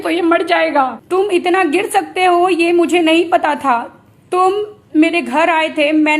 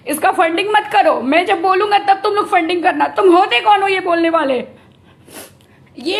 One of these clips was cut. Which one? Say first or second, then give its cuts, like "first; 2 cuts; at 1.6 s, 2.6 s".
first; 1 cut; at 1.0 s